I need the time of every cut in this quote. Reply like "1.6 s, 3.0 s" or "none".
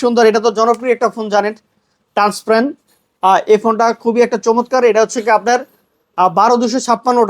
none